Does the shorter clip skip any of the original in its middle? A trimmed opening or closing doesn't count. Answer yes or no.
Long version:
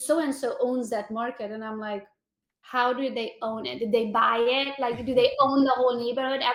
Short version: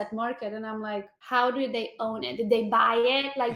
yes